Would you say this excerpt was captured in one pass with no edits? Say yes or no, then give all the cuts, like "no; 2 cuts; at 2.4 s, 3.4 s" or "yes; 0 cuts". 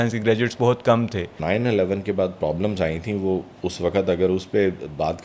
no; 1 cut; at 1.3 s